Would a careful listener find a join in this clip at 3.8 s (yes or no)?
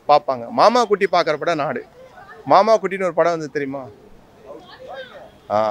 no